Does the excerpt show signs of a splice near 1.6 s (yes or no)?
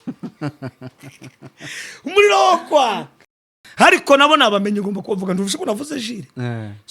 no